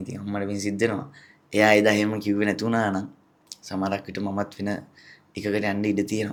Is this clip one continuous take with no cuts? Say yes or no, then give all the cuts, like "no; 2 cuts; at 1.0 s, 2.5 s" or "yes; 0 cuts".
yes; 0 cuts